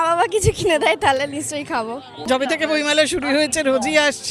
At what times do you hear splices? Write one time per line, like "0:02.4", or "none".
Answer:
0:02.2